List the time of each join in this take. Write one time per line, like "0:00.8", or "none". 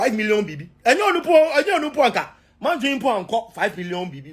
none